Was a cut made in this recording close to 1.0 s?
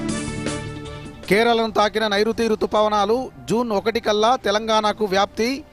yes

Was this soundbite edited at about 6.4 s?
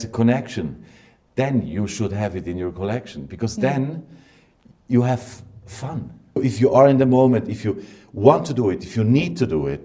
yes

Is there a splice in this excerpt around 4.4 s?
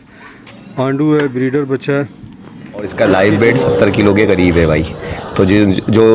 no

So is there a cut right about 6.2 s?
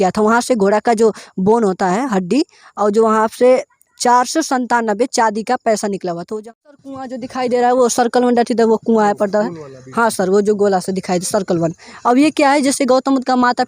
yes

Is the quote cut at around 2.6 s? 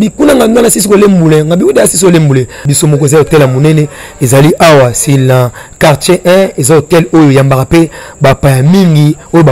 yes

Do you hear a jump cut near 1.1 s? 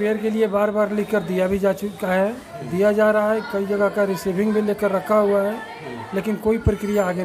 no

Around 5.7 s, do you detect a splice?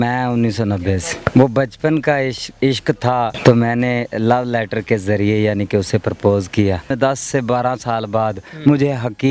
no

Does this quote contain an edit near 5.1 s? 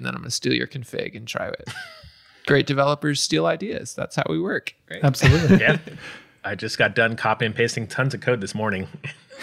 no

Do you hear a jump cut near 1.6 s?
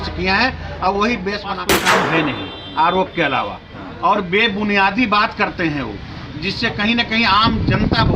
yes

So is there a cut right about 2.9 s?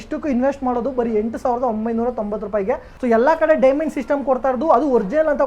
yes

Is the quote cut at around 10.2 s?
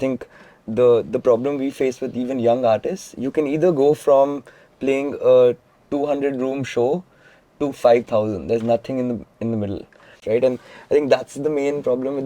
yes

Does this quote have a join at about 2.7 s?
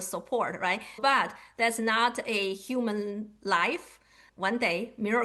no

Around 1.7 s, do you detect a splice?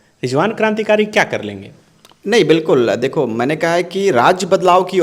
no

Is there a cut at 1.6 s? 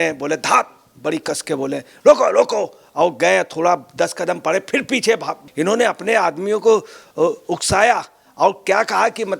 no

